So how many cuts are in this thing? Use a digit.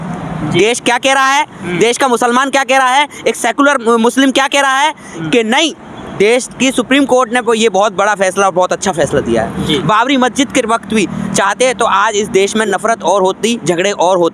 0